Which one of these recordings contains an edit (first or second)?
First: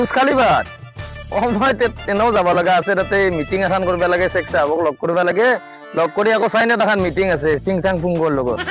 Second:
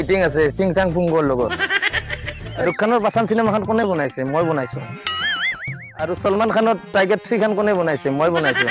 second